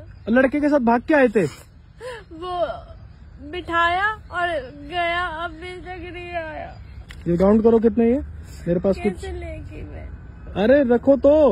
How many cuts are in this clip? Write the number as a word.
one